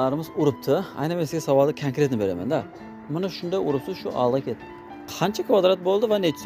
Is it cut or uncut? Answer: uncut